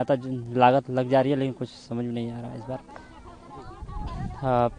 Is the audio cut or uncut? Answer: uncut